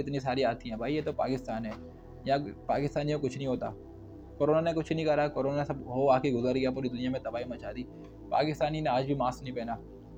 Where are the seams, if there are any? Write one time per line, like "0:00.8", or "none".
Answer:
none

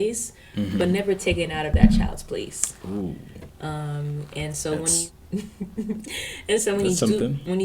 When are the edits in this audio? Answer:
0:05.0

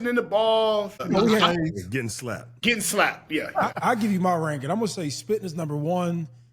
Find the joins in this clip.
0:01.0
0:02.5
0:03.7

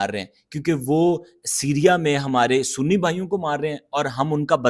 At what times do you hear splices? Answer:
none

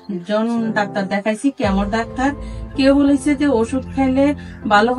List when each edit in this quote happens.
none

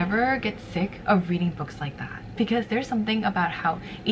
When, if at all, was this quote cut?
none

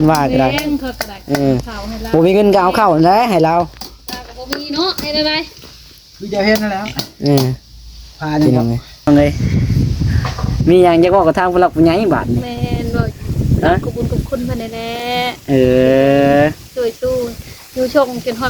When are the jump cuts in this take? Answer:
0:09.1

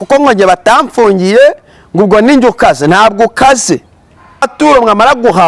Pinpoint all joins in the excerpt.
0:04.5

